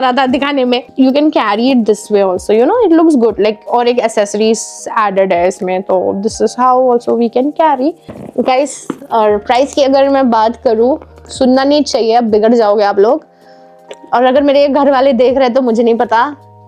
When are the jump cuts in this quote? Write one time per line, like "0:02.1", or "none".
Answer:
none